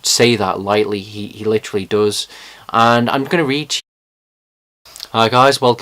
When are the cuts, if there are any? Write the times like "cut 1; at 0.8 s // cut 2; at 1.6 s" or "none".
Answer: none